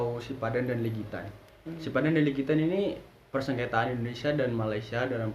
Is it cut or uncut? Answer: uncut